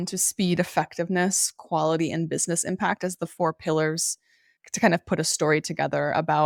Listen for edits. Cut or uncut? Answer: uncut